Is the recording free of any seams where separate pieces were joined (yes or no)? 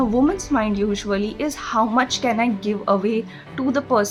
yes